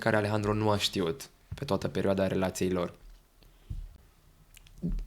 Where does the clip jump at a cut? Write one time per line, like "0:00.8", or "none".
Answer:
0:03.9